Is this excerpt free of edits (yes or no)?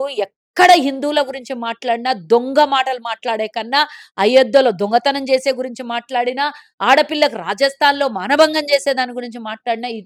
yes